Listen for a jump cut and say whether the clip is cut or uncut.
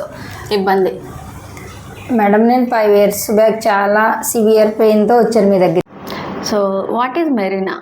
cut